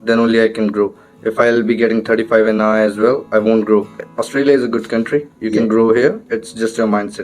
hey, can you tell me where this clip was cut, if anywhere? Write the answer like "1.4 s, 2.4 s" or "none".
4.0 s